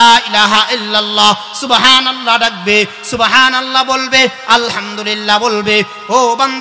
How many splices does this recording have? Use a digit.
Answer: 0